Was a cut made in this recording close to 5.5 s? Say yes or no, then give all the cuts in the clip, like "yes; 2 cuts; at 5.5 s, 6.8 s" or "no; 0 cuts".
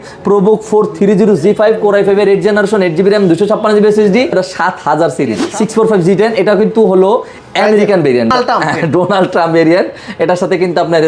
yes; 2 cuts; at 4.3 s, 5.5 s